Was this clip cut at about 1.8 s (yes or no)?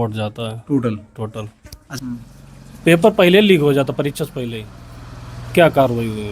yes